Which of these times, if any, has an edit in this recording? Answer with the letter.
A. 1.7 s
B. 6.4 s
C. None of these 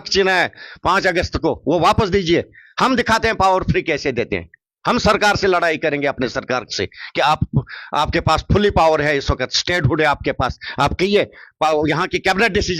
C